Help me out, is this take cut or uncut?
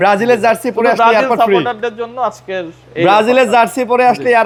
uncut